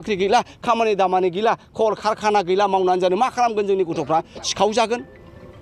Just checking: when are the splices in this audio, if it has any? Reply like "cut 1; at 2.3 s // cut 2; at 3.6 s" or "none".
none